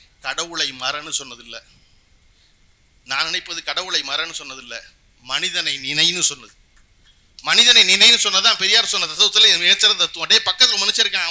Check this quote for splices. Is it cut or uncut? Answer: uncut